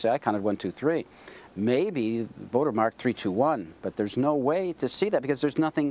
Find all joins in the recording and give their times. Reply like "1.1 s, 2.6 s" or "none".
none